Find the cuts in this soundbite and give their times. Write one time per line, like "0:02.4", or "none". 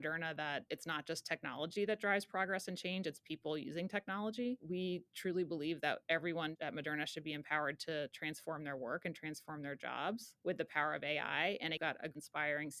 0:04.6
0:11.8